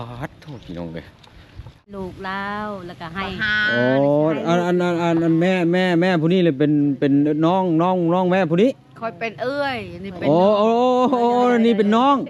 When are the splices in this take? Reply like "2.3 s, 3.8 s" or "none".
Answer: 1.8 s